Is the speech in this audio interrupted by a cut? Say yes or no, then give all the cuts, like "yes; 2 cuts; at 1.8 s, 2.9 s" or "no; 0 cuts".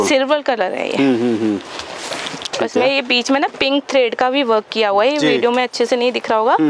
no; 0 cuts